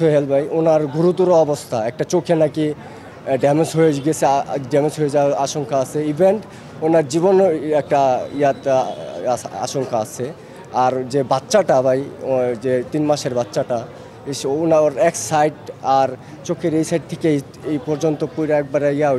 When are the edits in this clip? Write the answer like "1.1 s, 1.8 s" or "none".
none

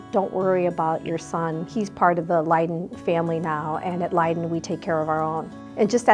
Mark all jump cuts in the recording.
1.7 s

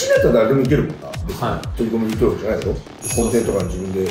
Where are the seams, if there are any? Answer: 1.7 s

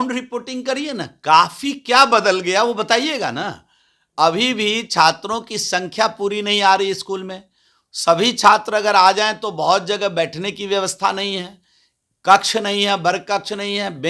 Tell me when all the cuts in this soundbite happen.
none

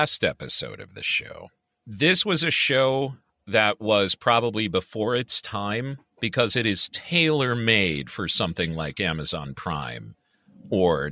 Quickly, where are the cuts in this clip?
none

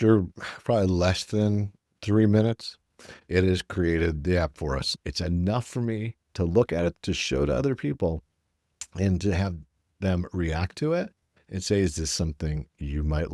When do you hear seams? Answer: 5.0 s, 6.9 s

